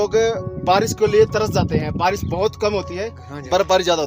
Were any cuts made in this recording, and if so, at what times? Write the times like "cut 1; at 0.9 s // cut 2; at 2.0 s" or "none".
none